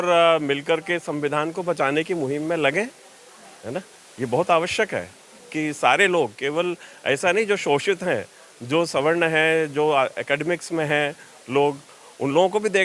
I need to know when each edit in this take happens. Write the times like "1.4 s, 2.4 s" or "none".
none